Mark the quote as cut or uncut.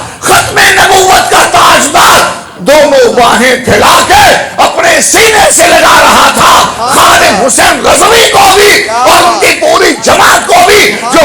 uncut